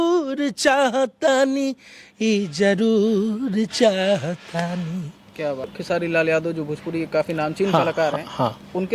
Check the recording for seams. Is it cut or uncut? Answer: cut